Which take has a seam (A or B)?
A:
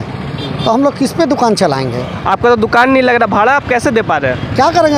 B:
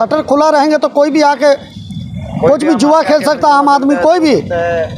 A